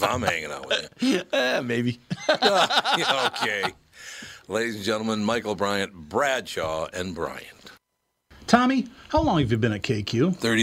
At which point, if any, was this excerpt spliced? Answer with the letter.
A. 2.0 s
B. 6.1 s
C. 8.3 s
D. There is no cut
C